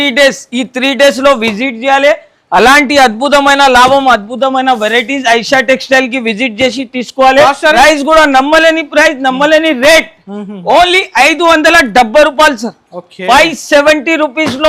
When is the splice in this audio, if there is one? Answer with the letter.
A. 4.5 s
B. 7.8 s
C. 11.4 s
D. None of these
B